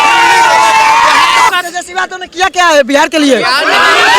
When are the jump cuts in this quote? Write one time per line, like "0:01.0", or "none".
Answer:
0:01.5